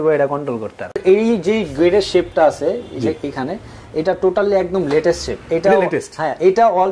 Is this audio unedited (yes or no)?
no